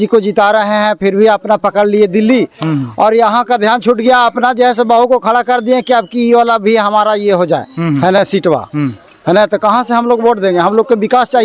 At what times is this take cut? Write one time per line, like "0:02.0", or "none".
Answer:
none